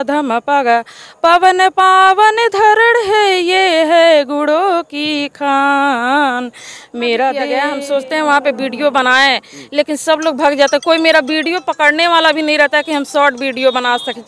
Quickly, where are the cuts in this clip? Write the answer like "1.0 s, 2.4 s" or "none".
7.6 s